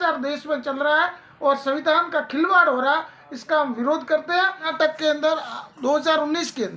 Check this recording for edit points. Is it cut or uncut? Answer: cut